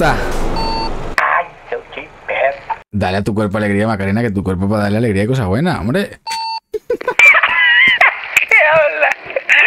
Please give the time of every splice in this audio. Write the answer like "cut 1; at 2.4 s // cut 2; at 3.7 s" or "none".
cut 1; at 1.1 s // cut 2; at 2.8 s